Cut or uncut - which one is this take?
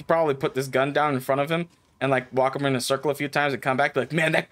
uncut